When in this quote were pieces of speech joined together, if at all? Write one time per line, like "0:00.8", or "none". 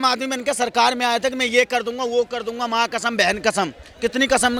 none